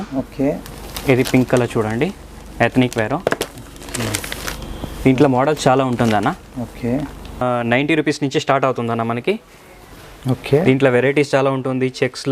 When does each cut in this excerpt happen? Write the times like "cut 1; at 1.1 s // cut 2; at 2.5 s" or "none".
cut 1; at 7.4 s